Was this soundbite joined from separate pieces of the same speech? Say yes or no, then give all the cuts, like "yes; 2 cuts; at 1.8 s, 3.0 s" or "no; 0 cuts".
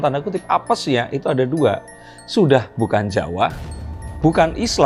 no; 0 cuts